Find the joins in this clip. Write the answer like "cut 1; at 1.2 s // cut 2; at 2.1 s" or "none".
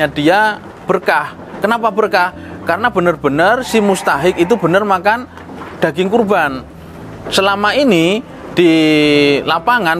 none